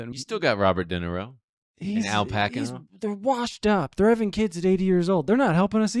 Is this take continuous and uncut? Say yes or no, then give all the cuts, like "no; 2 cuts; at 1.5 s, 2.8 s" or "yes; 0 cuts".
yes; 0 cuts